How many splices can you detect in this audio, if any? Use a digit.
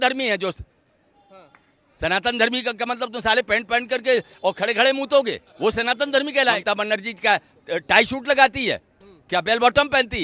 2